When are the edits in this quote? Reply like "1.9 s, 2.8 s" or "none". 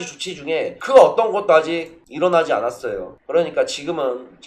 3.1 s